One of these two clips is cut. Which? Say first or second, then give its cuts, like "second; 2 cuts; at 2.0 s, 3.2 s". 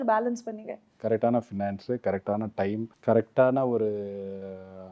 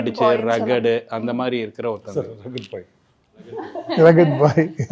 first; 2 cuts; at 0.9 s, 2.9 s